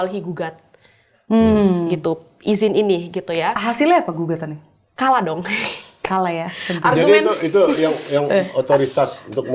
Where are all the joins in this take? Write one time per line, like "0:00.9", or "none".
none